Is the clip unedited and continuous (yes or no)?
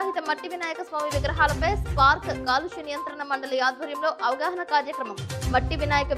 yes